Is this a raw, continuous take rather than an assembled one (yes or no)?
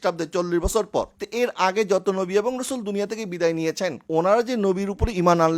no